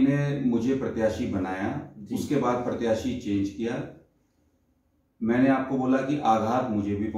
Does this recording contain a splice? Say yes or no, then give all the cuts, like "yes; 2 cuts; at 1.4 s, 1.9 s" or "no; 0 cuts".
no; 0 cuts